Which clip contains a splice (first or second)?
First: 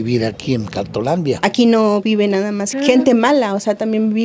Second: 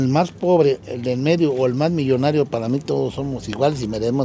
first